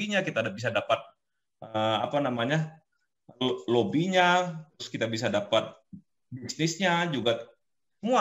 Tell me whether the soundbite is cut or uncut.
uncut